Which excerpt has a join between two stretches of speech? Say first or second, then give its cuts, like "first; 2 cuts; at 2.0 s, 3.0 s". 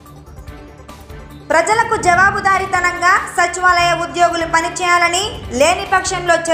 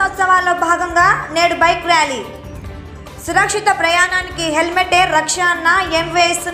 first; 1 cut; at 1.4 s